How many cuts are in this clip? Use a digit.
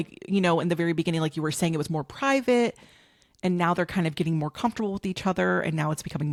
0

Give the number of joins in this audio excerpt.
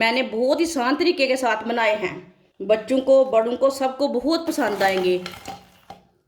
1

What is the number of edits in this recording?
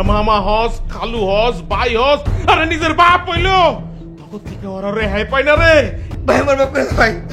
1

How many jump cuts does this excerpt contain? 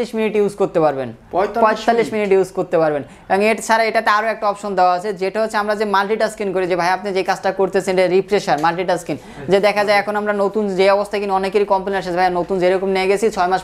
0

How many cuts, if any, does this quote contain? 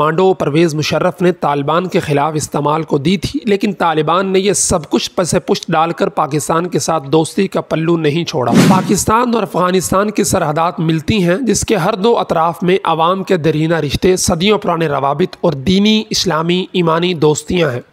1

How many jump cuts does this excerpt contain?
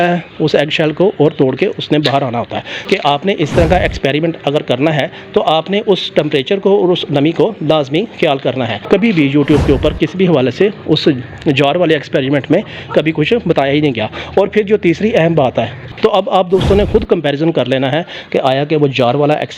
3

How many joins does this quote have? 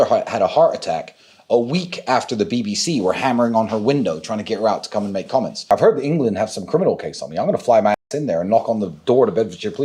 1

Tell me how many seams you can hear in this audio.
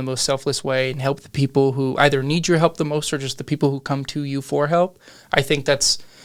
0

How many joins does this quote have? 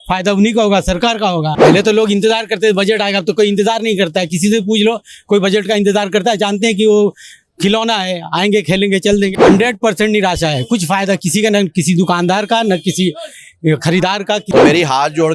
3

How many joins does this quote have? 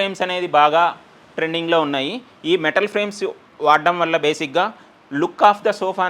0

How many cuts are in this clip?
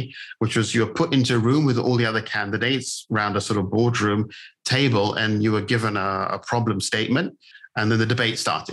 1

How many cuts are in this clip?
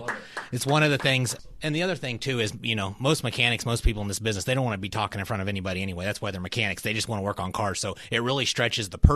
1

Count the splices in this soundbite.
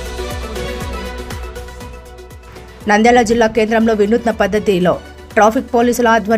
1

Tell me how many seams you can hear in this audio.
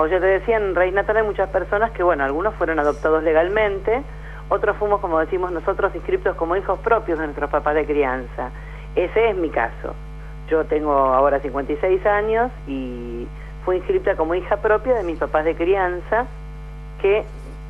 0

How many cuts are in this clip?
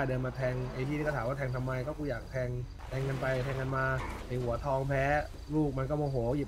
3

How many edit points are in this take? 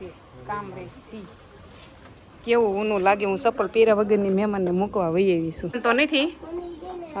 1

